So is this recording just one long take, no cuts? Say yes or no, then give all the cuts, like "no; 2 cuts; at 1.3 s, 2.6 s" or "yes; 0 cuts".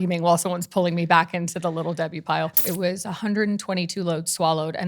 no; 1 cut; at 2.6 s